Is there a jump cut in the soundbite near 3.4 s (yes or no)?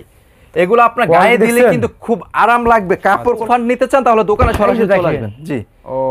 yes